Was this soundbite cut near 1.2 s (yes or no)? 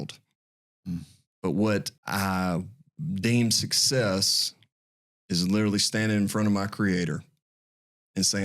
yes